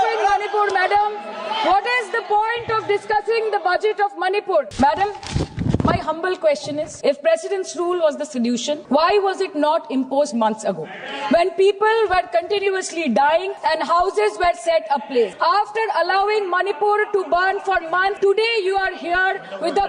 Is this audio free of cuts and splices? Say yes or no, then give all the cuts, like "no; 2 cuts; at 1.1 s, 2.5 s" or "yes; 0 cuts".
no; 6 cuts; at 4.7 s, 6.9 s, 8.8 s, 13.5 s, 15.3 s, 18.2 s